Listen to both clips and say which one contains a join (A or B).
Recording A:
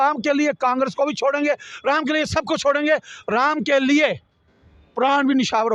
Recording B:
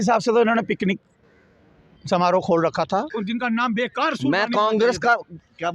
B